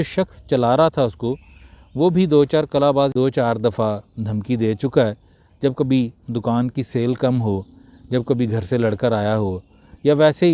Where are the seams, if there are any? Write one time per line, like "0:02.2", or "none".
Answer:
0:03.1